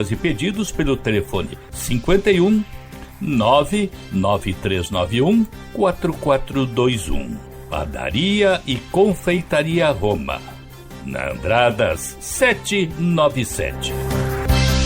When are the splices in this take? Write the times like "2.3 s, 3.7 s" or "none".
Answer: 13.8 s